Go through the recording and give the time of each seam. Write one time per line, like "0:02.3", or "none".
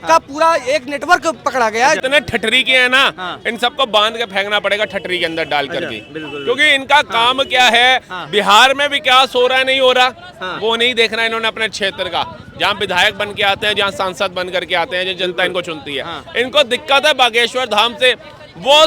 0:02.0